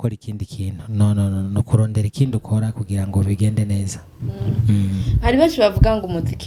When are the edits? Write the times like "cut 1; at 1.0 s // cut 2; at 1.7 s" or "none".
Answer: none